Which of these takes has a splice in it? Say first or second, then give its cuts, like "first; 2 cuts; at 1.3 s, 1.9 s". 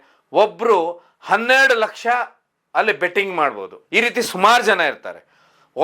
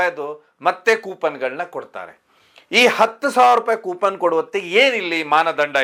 first; 1 cut; at 3.7 s